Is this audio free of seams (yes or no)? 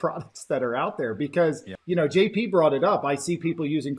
no